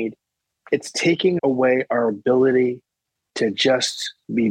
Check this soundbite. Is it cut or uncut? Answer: cut